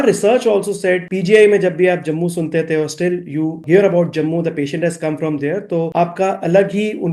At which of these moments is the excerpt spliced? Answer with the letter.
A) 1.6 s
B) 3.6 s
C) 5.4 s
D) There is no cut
B